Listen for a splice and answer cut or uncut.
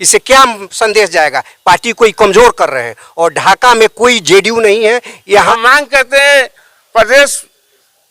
cut